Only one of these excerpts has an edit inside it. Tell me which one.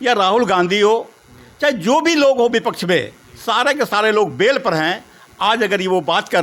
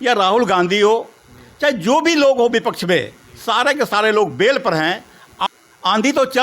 second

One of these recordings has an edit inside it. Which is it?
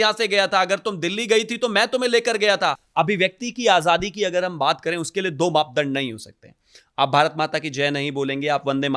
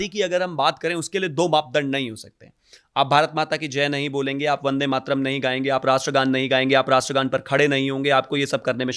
first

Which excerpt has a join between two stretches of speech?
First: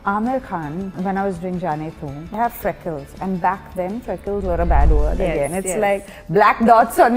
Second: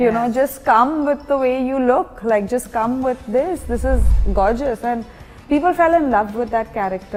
first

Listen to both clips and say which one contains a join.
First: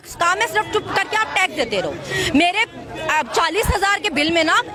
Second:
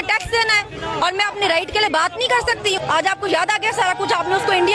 second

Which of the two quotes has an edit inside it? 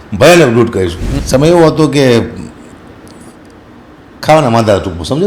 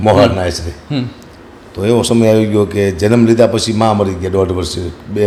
first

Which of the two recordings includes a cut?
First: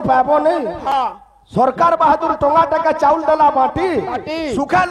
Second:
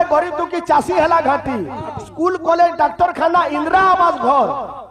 first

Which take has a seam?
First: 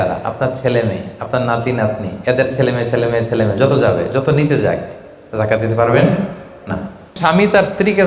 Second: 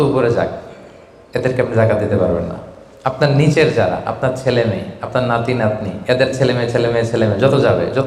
first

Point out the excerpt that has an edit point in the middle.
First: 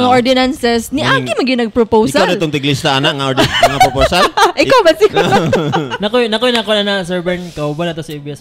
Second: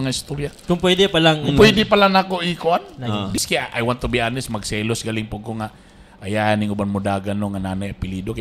second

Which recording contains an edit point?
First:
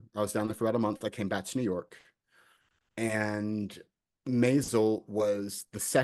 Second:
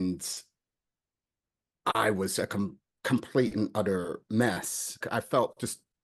second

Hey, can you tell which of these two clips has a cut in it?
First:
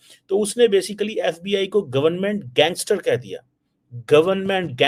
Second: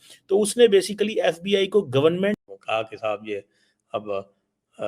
second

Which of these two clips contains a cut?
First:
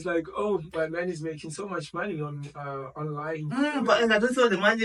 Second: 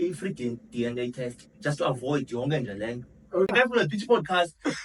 second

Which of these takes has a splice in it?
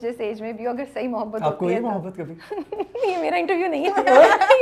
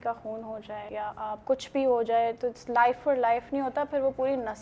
second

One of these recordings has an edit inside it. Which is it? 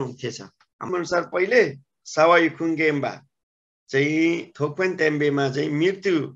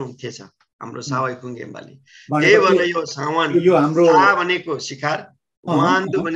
first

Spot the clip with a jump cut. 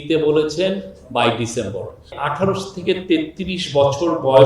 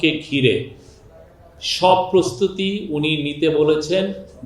first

